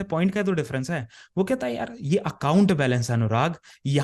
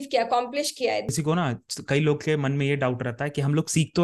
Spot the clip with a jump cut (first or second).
second